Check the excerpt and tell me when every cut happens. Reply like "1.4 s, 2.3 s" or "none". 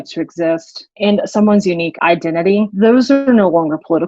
0.9 s, 2.1 s